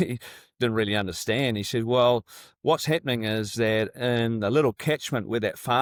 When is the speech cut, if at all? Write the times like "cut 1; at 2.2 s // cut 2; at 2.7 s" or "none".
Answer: none